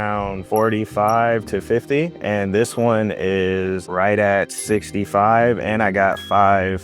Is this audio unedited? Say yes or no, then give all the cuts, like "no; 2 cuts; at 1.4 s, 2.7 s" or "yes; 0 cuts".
no; 1 cut; at 3.8 s